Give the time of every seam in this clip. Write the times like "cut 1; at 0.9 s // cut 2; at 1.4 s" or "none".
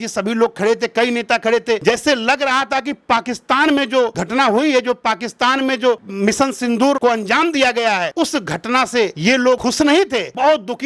none